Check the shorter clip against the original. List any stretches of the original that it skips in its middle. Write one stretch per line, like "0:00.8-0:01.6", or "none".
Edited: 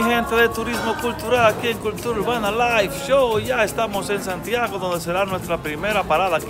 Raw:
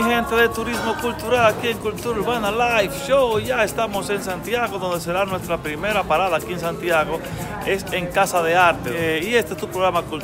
none